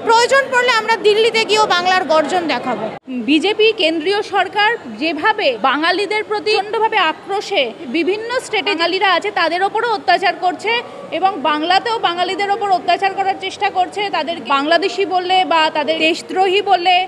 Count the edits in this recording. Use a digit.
7